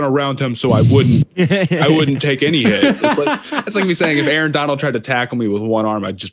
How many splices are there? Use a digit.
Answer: 1